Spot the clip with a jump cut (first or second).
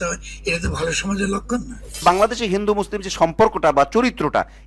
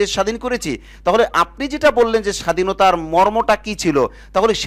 first